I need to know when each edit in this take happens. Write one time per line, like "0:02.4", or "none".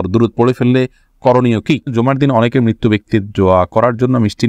0:01.9